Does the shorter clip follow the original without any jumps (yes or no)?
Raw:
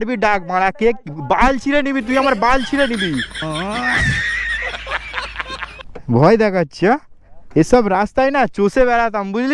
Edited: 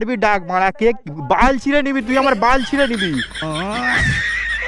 yes